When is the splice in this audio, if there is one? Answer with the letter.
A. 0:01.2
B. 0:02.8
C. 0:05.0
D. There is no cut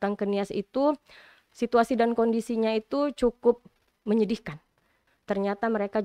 C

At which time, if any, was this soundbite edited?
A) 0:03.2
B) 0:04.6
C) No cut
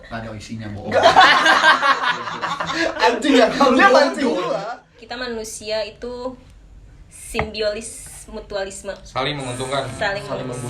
B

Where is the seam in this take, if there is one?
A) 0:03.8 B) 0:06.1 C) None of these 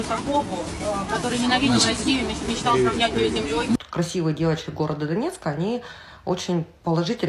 A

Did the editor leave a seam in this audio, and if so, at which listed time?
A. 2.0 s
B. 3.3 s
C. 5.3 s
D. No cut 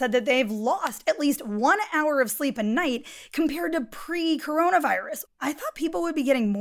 C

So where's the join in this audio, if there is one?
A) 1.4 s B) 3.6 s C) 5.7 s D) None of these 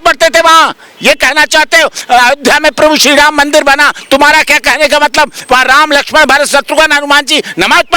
D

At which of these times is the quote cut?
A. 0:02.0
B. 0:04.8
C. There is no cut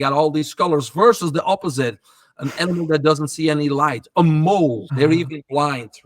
B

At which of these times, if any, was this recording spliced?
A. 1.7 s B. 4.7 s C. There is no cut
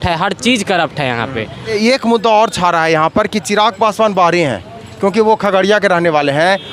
A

